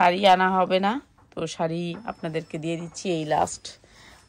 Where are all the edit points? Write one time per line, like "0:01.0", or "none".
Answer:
none